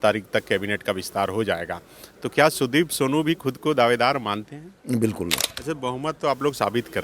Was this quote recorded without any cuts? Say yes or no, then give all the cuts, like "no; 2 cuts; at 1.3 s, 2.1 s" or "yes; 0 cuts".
no; 1 cut; at 5.5 s